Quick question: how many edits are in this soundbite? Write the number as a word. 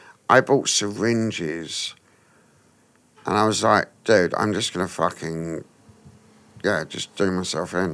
zero